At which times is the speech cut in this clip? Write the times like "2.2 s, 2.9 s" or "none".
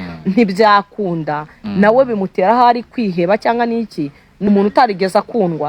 4.5 s